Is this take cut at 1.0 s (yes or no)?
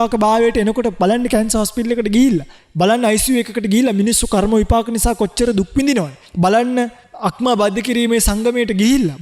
no